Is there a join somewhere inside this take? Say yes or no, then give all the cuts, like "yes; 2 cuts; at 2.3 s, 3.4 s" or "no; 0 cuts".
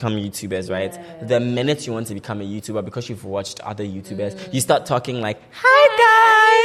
no; 0 cuts